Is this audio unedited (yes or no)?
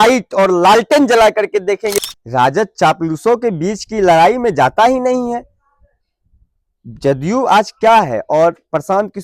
no